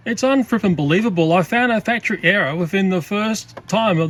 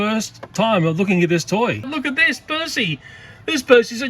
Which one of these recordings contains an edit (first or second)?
second